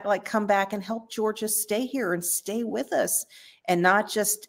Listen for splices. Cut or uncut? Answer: uncut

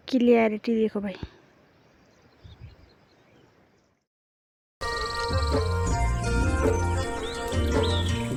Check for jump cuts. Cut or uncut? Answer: uncut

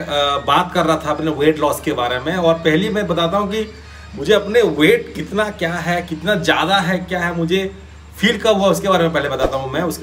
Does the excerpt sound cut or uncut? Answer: uncut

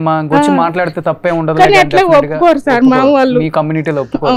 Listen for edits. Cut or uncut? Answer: uncut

